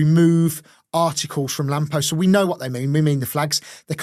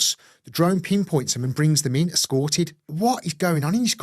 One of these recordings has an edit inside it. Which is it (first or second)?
second